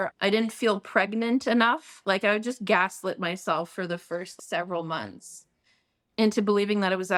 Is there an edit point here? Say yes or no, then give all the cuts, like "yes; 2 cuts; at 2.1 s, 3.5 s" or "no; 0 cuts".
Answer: no; 0 cuts